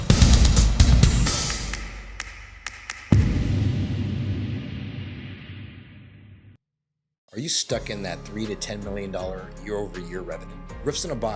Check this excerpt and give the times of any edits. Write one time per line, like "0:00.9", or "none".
none